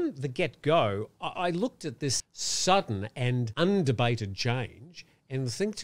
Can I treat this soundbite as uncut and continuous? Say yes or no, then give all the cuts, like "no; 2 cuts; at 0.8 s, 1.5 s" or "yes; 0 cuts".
no; 2 cuts; at 2.2 s, 3.5 s